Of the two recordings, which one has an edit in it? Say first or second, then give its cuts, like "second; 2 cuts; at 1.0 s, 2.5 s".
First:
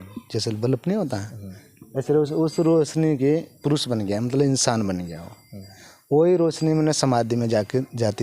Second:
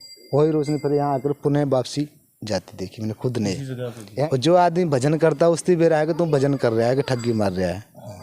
second; 1 cut; at 4.3 s